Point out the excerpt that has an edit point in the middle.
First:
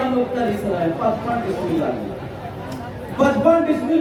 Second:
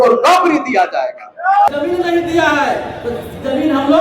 second; 1 cut; at 1.7 s

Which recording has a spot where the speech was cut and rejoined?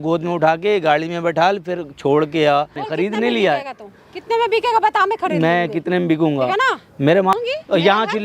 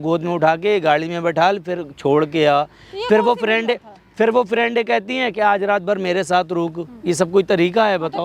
first; 2 cuts; at 2.8 s, 7.3 s

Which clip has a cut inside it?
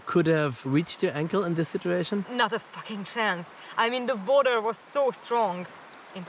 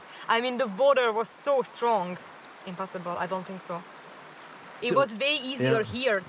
second; 1 cut; at 4.8 s

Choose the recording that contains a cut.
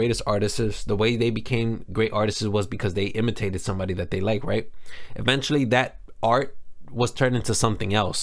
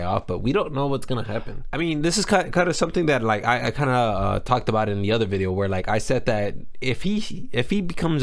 second; 1 cut; at 1.6 s

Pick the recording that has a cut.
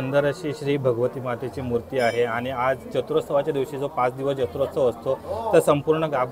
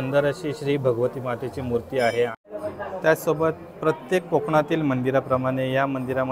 second; 1 cut; at 2.3 s

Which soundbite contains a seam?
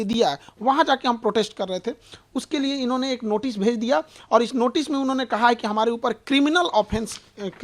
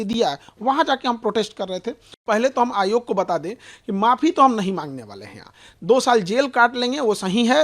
second; 1 cut; at 2.1 s

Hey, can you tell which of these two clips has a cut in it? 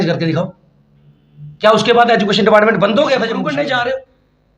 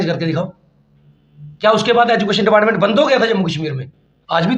first; 1 cut; at 3.4 s

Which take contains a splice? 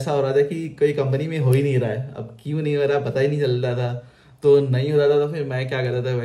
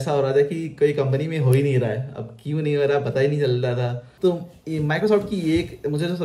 second; 1 cut; at 4.0 s

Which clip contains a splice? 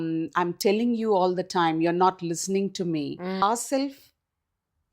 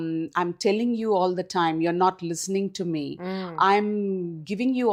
first; 1 cut; at 3.4 s

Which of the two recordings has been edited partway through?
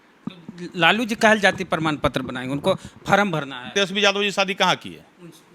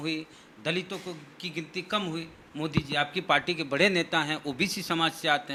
first; 1 cut; at 3.7 s

